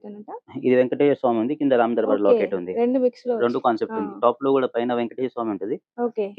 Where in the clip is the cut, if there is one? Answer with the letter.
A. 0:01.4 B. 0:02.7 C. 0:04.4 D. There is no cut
D